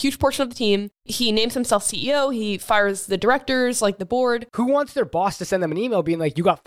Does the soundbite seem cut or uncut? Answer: cut